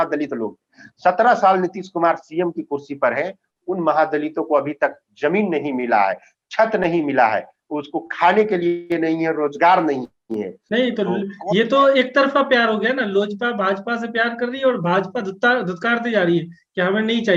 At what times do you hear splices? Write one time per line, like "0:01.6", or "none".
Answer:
0:10.6